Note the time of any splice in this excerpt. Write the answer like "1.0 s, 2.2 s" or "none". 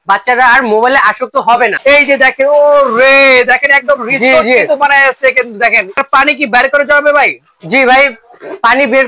1.8 s, 6.0 s

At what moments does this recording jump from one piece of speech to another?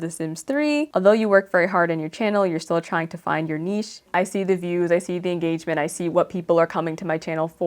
0.9 s, 4.0 s

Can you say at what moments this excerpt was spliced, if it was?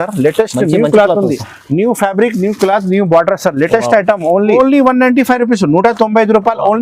4.6 s

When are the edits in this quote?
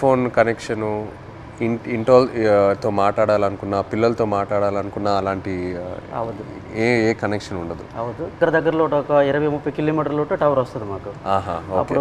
8.4 s

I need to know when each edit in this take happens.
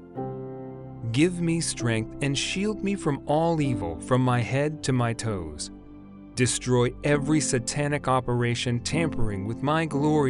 1.0 s

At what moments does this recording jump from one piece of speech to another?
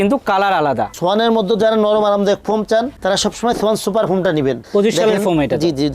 0.9 s, 4.6 s

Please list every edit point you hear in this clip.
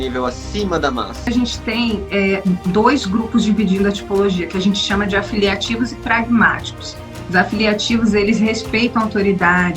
1.3 s

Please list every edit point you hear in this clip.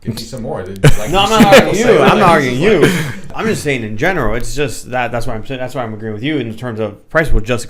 3.3 s

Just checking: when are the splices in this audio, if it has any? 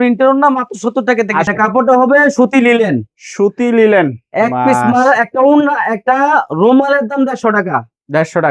1.5 s

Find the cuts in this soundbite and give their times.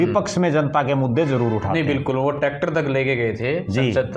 none

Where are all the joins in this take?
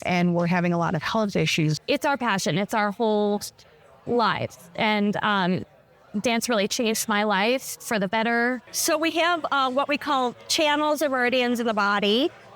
1.8 s, 8.7 s

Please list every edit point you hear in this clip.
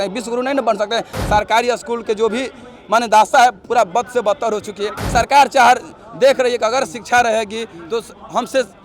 1.1 s, 5.0 s

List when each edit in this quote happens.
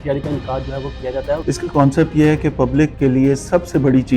1.4 s, 2.9 s

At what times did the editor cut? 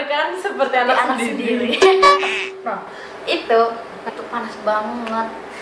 4.1 s

